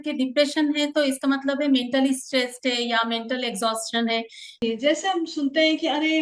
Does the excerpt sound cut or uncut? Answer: cut